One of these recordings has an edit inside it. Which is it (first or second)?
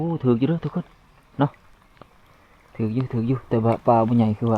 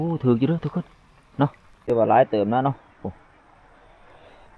second